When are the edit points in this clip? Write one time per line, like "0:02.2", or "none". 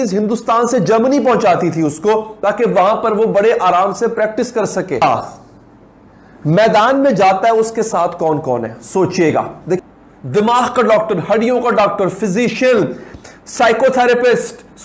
0:09.8